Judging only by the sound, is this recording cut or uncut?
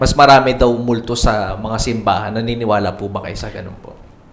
uncut